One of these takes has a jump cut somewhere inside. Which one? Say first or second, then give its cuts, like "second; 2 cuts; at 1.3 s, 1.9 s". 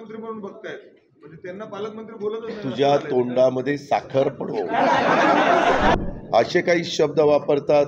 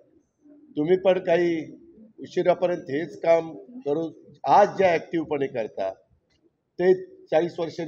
first; 1 cut; at 6.0 s